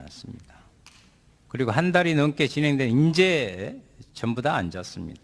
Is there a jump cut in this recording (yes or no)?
yes